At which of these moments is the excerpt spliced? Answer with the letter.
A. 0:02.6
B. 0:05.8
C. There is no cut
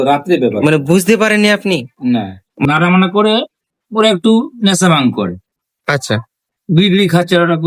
A